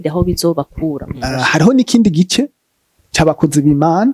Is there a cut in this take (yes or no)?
yes